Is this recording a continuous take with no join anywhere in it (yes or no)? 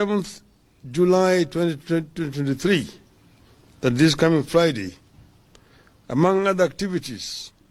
yes